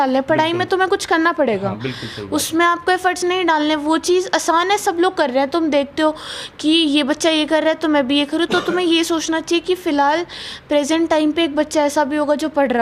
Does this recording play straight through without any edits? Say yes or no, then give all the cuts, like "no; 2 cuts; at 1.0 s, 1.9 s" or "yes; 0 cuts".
yes; 0 cuts